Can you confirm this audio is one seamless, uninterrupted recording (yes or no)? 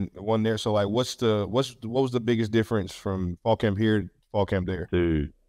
yes